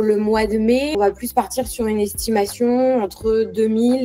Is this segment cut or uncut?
cut